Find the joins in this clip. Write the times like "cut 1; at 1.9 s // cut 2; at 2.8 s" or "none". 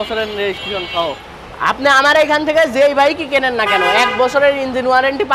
cut 1; at 1.3 s